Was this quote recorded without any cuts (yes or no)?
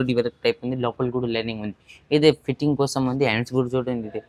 yes